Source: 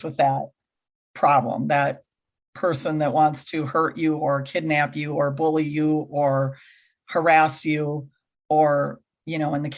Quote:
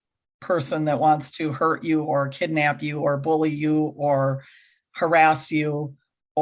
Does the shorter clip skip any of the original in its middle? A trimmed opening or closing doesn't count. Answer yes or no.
no